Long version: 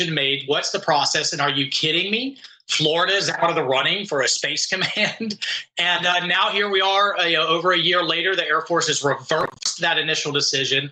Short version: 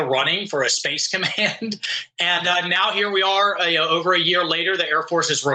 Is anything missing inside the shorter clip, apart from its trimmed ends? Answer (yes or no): no